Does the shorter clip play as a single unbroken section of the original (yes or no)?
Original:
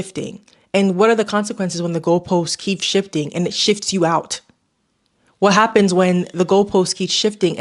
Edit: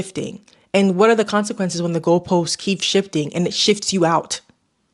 yes